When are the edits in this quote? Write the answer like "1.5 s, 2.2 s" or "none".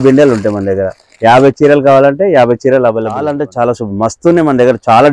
3.4 s